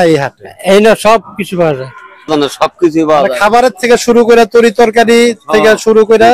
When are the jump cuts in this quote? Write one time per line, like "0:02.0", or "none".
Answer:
0:02.3